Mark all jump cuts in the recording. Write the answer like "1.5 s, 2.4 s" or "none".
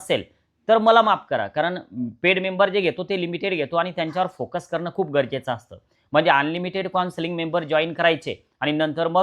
none